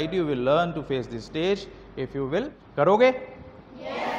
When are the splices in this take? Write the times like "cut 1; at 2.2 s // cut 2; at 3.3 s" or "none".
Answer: cut 1; at 2.6 s